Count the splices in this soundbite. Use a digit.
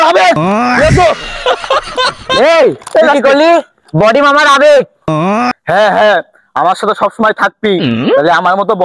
1